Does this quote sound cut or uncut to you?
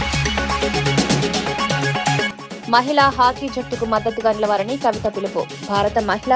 cut